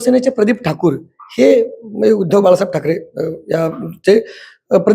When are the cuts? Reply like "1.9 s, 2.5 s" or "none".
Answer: none